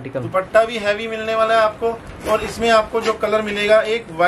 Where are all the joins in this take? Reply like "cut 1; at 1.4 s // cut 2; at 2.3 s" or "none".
none